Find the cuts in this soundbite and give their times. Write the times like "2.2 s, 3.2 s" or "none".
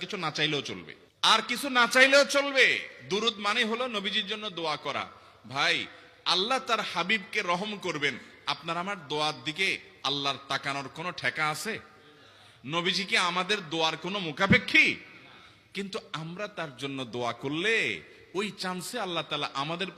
none